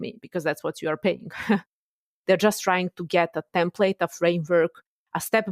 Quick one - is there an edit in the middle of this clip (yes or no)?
yes